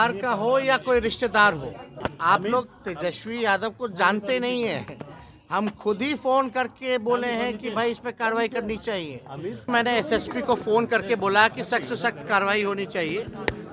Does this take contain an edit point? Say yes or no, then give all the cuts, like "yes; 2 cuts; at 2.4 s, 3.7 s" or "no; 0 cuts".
yes; 2 cuts; at 2.1 s, 9.7 s